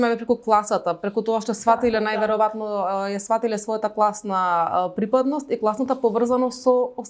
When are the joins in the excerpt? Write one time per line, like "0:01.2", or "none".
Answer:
none